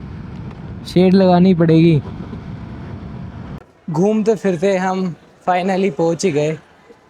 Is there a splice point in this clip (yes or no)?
yes